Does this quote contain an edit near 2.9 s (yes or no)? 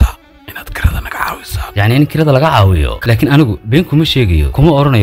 yes